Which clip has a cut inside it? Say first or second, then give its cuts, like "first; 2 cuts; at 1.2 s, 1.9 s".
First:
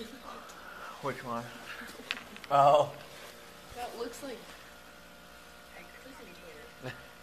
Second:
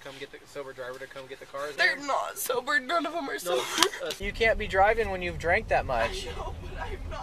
second; 2 cuts; at 1.7 s, 4.2 s